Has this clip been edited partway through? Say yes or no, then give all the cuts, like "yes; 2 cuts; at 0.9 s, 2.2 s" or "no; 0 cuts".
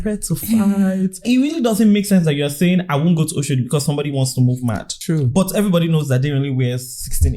yes; 2 cuts; at 1.2 s, 4.9 s